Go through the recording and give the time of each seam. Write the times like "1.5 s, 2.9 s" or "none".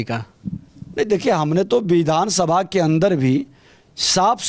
none